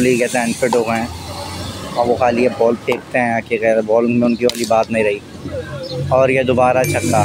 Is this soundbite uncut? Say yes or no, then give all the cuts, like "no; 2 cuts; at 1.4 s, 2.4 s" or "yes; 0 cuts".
yes; 0 cuts